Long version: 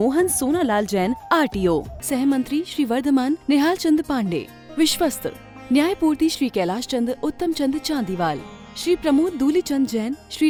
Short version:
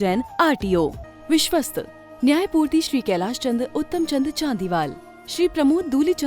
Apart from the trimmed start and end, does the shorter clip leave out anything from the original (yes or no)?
yes